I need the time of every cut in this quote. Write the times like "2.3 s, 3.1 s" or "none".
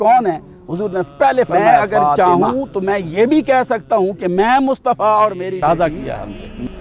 2.2 s, 5.6 s